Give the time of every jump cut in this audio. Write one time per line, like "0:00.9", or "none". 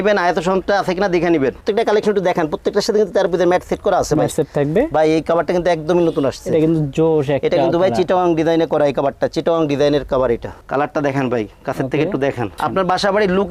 0:01.6
0:10.5
0:12.6